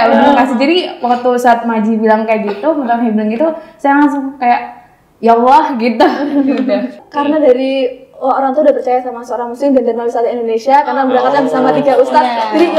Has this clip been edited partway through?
yes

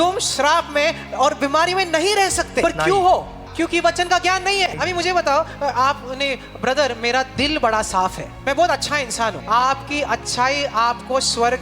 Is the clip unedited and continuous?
no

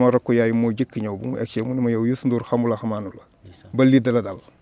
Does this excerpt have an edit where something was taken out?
no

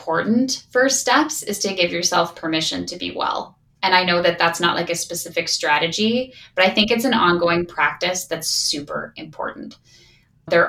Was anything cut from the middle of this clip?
no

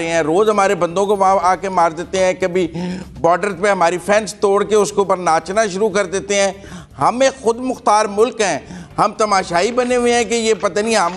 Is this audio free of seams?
yes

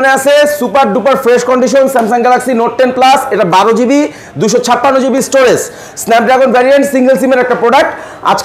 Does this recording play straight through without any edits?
yes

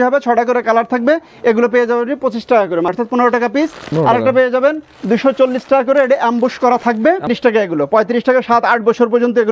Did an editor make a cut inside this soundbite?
yes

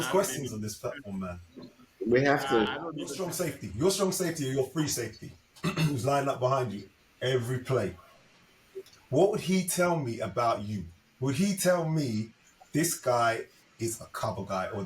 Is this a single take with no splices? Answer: no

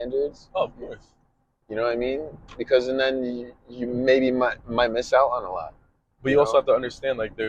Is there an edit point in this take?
no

